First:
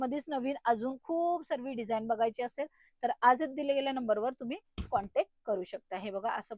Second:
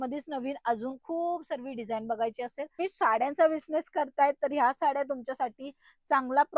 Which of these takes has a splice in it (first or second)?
second